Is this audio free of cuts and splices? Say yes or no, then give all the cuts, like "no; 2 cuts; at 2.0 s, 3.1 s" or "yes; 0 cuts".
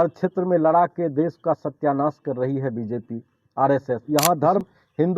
no; 1 cut; at 4.0 s